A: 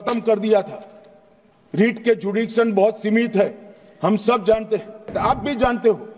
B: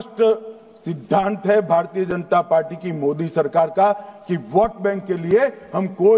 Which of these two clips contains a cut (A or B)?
A